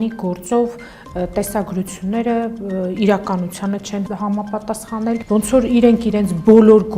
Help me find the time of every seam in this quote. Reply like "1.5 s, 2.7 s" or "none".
4.1 s, 5.2 s